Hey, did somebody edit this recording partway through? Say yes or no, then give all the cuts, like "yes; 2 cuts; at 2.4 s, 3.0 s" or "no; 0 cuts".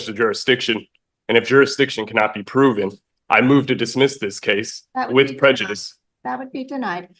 no; 0 cuts